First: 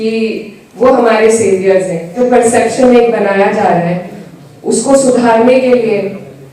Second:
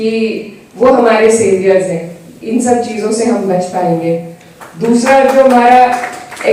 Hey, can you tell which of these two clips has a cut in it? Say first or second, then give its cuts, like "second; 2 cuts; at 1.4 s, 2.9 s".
first; 1 cut; at 2.2 s